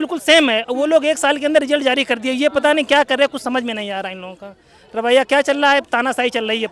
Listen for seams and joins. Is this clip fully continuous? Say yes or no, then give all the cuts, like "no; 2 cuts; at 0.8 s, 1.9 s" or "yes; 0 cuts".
yes; 0 cuts